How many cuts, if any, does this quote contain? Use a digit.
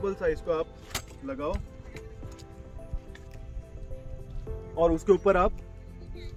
0